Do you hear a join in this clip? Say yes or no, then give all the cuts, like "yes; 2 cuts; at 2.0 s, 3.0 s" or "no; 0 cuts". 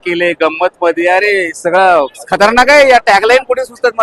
no; 0 cuts